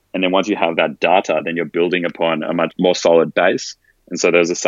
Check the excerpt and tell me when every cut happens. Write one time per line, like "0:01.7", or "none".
0:02.7